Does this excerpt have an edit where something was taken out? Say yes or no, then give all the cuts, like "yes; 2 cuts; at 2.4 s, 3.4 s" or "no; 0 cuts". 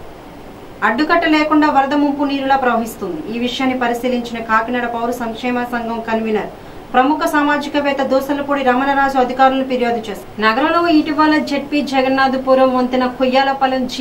yes; 1 cut; at 10.3 s